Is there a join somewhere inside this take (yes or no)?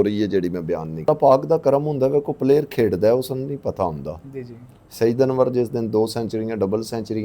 yes